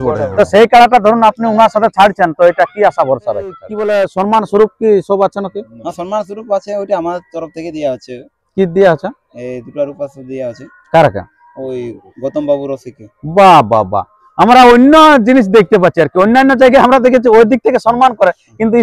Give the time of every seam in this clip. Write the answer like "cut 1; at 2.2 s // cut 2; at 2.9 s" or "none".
cut 1; at 3.7 s